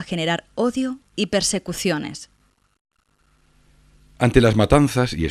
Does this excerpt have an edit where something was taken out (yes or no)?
yes